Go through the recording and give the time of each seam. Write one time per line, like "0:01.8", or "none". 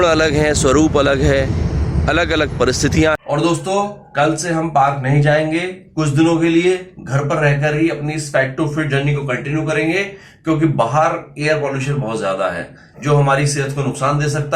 0:03.2